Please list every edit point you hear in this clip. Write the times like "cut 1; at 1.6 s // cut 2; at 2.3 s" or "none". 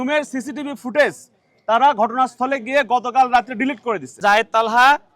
cut 1; at 4.1 s